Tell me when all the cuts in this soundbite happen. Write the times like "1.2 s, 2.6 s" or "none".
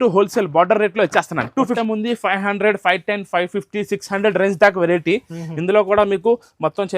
1.8 s